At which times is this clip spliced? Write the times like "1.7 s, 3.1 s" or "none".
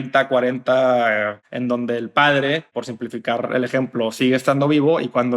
1.3 s, 2.7 s